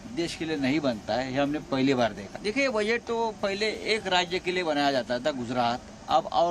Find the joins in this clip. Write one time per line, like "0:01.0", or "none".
0:02.3